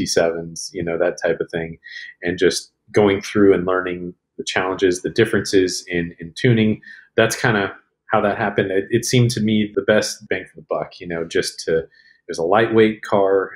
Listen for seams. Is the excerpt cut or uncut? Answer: uncut